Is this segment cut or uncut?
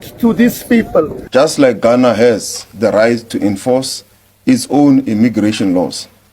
cut